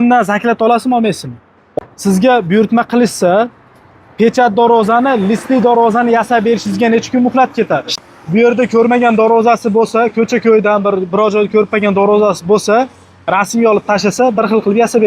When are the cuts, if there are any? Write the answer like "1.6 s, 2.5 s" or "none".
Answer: 1.6 s, 7.9 s